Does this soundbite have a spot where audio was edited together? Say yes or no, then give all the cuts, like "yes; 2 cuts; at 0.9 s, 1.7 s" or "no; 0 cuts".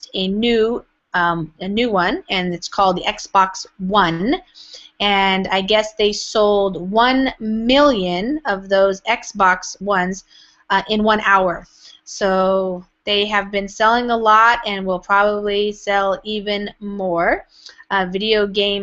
no; 0 cuts